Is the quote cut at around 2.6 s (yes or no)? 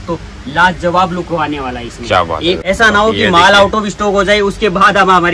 yes